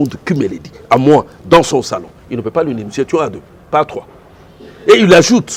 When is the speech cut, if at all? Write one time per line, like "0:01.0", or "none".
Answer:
none